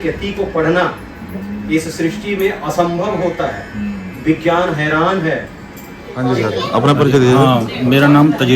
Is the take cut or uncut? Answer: cut